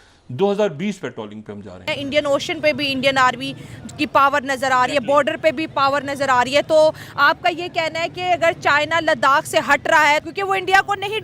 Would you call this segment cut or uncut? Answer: cut